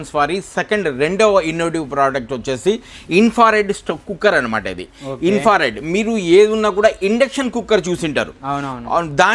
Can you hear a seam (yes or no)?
no